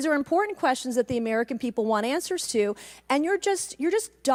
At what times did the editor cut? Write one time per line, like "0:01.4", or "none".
none